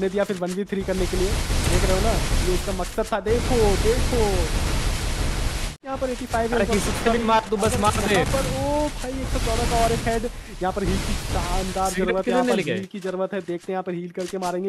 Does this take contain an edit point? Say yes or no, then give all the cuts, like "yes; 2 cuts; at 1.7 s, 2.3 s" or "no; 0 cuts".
yes; 1 cut; at 5.8 s